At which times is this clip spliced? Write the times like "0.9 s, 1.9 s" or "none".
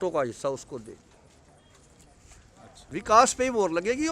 2.8 s